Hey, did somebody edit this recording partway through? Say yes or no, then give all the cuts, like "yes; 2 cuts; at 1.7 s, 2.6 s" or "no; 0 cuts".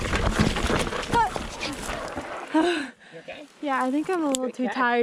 no; 0 cuts